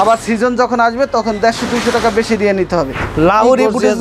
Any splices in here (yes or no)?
yes